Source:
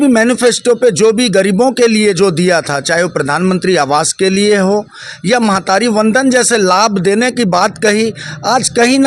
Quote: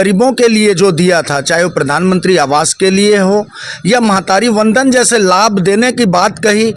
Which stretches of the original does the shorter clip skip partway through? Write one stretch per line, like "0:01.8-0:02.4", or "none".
none